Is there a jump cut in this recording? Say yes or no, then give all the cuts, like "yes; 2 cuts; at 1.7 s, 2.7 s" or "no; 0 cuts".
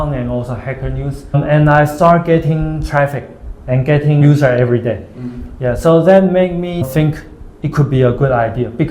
yes; 2 cuts; at 1.3 s, 6.8 s